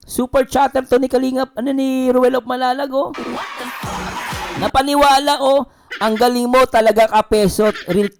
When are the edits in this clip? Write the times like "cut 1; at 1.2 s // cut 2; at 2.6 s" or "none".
none